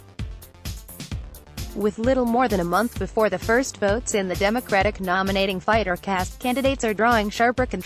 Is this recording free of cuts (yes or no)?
no